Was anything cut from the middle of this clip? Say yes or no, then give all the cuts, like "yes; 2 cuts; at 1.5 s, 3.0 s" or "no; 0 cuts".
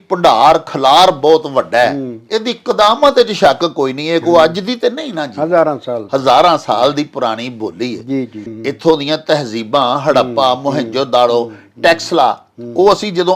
no; 0 cuts